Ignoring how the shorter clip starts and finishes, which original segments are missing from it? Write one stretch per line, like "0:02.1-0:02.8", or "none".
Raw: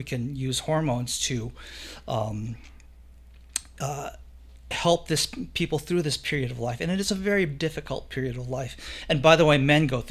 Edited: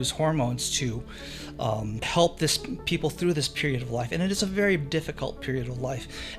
0:02.5-0:04.7